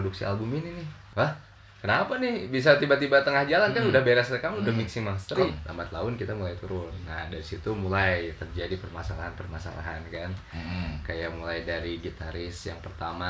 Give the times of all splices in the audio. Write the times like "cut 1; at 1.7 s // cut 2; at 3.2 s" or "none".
cut 1; at 1.0 s // cut 2; at 5.6 s